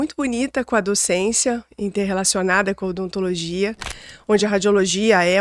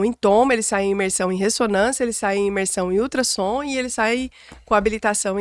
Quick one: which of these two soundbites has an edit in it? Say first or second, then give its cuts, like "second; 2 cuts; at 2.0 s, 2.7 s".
first; 1 cut; at 4.0 s